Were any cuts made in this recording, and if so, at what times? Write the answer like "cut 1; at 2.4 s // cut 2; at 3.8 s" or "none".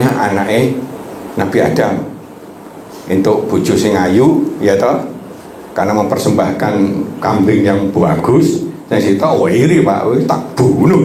none